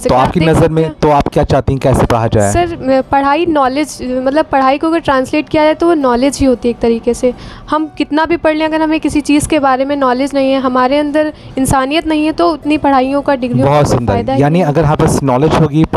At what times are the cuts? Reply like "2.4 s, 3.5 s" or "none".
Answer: none